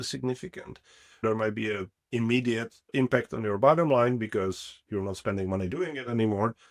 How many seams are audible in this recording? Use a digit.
2